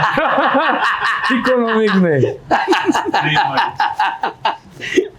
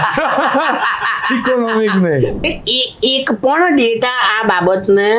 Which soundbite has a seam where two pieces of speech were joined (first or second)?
second